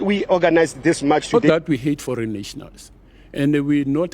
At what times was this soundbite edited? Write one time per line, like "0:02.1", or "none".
0:01.3